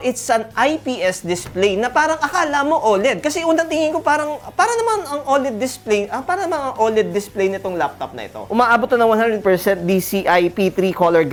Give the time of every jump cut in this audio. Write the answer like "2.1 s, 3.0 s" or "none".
none